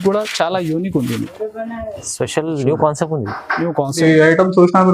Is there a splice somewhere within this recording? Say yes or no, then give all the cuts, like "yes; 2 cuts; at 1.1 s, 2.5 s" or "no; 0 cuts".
yes; 1 cut; at 4.0 s